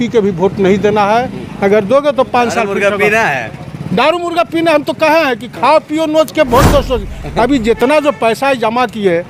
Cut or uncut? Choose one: uncut